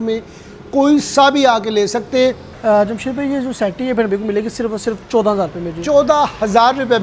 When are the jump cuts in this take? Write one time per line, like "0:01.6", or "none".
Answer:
0:02.5